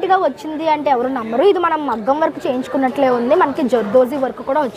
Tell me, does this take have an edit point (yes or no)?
no